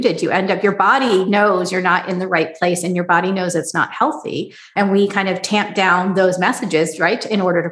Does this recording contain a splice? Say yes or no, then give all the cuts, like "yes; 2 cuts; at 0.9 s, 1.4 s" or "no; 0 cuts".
yes; 1 cut; at 4.7 s